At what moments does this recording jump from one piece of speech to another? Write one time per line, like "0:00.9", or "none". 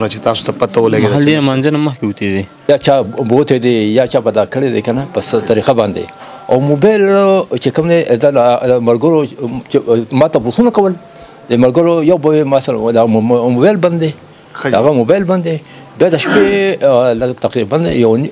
0:02.7